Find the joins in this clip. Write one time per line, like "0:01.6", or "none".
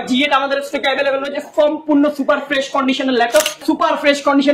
0:03.6